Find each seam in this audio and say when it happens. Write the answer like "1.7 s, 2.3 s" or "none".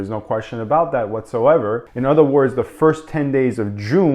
1.8 s